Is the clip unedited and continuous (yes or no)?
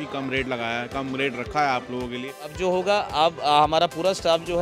no